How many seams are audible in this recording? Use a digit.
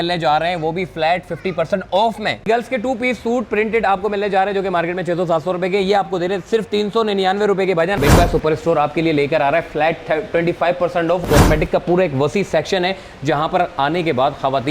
3